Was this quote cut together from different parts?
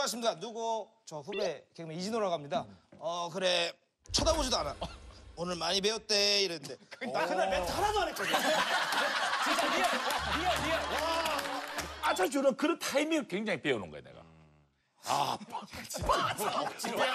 yes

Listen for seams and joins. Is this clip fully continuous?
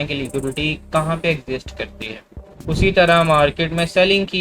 no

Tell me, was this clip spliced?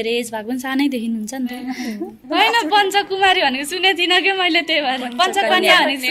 yes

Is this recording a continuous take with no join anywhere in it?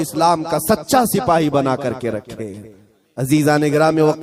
yes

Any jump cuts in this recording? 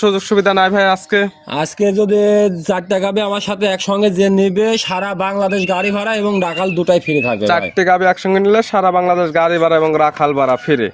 no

